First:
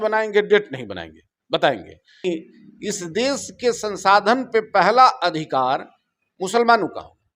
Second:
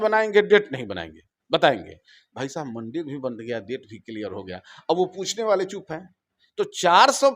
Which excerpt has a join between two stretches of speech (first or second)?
first